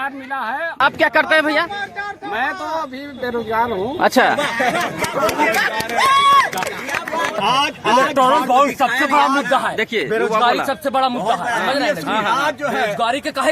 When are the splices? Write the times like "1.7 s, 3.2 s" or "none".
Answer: 0.8 s, 7.4 s